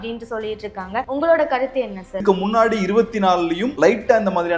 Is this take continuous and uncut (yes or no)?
no